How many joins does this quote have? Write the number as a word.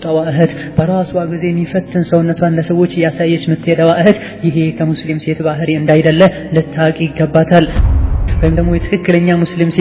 one